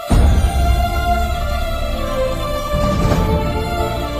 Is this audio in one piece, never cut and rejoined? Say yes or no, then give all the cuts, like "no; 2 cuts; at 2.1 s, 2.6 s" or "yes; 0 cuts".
yes; 0 cuts